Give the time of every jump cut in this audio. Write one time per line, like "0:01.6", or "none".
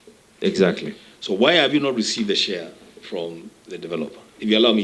none